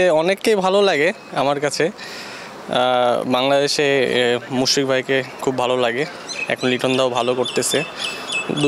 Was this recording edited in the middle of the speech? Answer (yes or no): no